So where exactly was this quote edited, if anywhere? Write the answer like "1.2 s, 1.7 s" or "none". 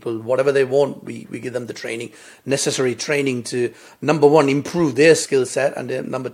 5.2 s